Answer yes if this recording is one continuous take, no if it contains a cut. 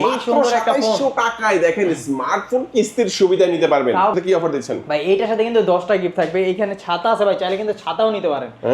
no